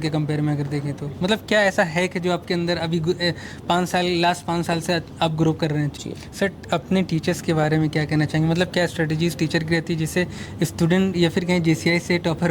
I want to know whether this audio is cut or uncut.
cut